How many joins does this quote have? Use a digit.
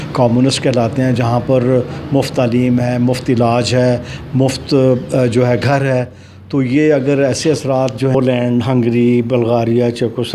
1